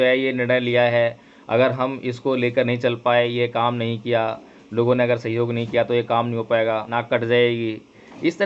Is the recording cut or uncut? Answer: cut